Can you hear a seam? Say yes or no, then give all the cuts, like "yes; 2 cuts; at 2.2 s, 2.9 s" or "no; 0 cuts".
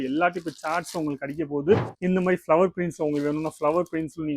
yes; 1 cut; at 1.9 s